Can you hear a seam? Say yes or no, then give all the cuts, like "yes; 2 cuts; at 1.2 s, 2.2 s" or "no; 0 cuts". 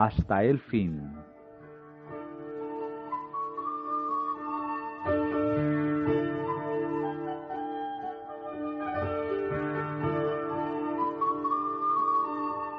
yes; 1 cut; at 8.6 s